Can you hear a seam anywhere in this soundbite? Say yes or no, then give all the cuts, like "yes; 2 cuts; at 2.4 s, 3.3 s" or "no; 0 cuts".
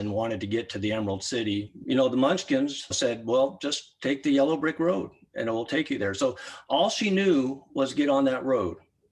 no; 0 cuts